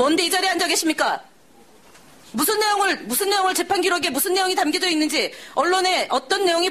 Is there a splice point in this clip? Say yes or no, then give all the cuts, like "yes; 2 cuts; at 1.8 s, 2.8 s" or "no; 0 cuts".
yes; 1 cut; at 1.0 s